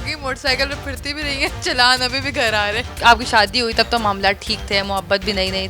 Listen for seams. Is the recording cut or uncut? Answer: cut